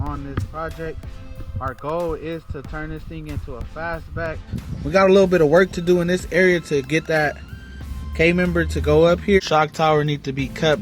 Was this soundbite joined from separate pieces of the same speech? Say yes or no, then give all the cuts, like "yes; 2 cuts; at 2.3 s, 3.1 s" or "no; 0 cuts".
yes; 2 cuts; at 4.6 s, 9.4 s